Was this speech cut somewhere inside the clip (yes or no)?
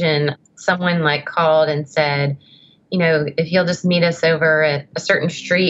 no